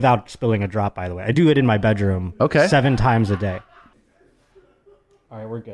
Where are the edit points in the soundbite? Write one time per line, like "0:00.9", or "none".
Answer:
0:03.9